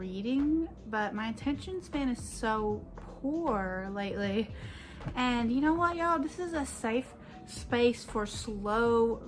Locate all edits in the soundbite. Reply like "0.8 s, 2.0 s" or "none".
none